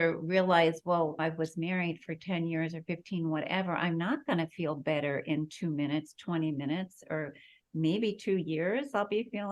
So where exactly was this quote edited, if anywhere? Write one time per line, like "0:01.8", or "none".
0:01.2

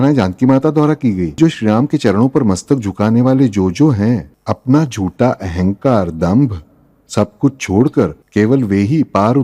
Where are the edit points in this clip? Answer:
0:01.4
0:04.3
0:08.2

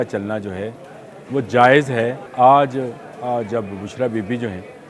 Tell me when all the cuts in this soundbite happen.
0:02.2

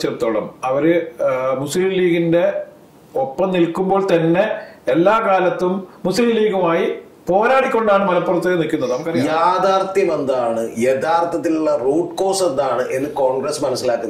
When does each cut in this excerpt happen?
0:09.1

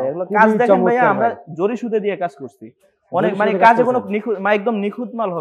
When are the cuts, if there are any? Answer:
none

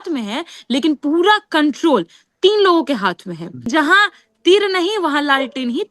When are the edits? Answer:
0:03.7

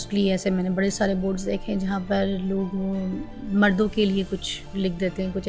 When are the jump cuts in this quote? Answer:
none

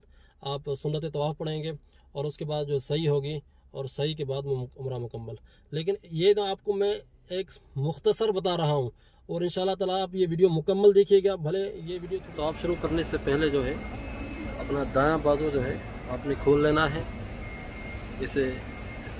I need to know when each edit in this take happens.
0:12.2

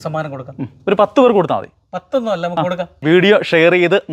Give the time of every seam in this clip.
0:02.9

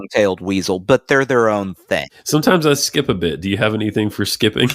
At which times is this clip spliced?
0:02.0

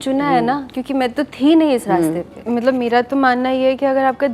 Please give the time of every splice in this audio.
0:02.3

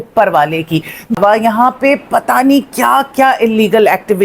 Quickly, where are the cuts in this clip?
0:01.2

